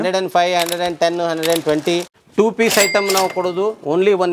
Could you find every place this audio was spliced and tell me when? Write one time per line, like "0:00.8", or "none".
0:02.1